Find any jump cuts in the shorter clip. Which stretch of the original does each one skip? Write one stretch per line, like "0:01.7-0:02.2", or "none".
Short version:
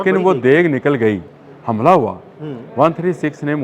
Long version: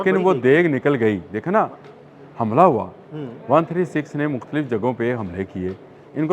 0:01.3-0:02.0